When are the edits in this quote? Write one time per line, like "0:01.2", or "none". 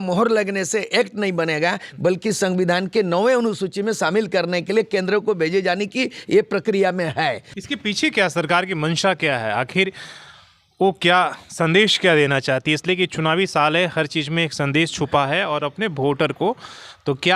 0:07.5